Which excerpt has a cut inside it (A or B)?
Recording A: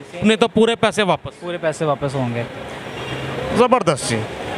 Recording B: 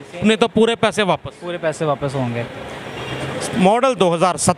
B